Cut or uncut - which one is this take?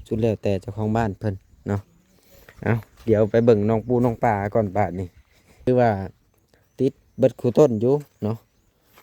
cut